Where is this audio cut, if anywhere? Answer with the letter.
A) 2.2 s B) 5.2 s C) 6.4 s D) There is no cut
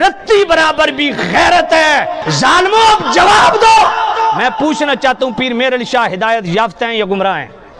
A